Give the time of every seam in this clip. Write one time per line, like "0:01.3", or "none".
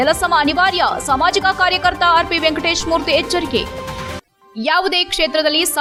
none